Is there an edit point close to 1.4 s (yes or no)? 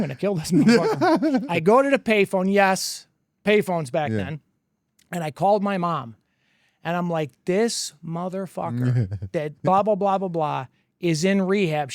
yes